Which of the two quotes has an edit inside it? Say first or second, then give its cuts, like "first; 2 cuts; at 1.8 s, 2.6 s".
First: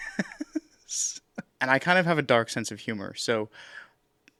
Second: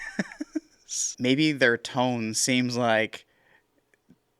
second; 1 cut; at 1.1 s